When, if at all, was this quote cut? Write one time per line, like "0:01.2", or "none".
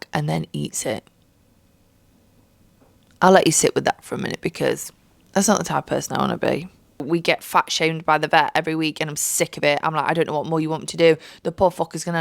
0:07.0